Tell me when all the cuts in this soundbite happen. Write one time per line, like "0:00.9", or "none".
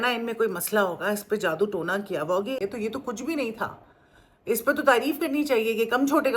0:02.6